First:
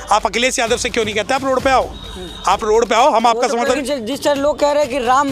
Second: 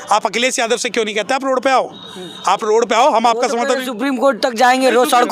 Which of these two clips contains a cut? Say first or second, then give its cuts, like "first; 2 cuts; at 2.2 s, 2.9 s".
first; 1 cut; at 3.8 s